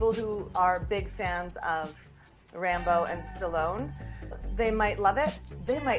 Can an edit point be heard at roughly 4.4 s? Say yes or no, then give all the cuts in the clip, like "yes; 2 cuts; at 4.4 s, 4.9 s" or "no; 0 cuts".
yes; 1 cut; at 4.4 s